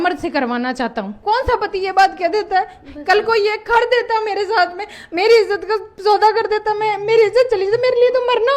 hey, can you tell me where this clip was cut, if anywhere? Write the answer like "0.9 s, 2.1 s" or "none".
1.1 s